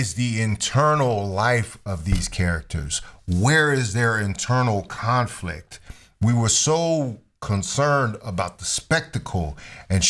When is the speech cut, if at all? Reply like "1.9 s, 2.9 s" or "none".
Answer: none